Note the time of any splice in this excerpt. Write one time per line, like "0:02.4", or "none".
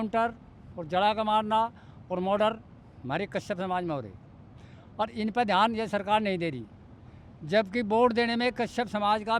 none